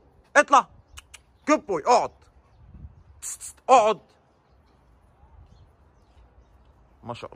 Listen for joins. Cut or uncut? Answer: uncut